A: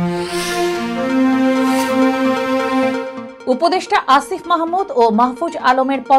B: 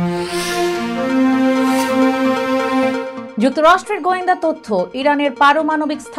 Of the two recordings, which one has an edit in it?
A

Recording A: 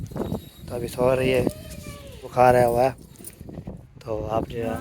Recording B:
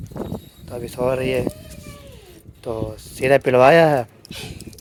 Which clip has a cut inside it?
A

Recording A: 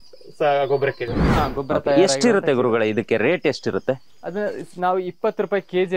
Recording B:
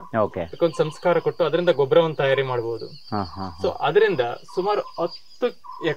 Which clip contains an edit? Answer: A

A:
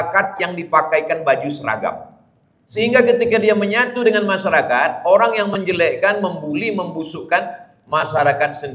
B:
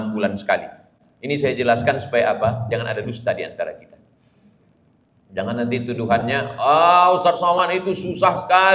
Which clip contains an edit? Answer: B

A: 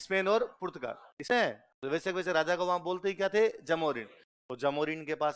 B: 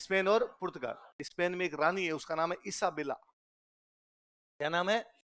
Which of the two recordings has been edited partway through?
A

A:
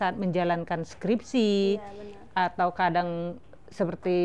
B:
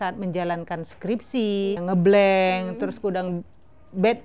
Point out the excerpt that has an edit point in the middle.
B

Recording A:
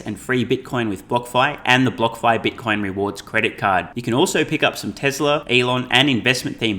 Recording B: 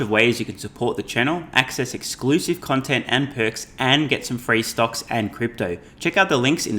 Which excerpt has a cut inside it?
A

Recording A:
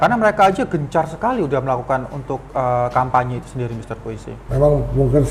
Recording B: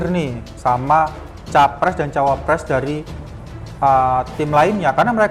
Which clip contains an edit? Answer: A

